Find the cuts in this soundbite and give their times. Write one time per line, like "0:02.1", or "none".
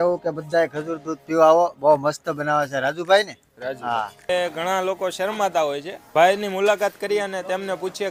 none